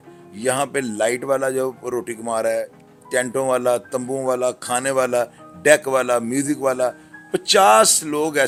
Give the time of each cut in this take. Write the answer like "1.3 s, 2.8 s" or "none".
none